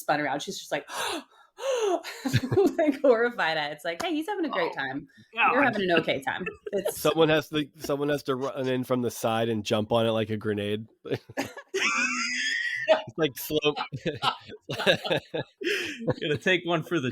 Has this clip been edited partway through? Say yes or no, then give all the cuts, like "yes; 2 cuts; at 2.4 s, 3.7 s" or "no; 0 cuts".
yes; 1 cut; at 15.5 s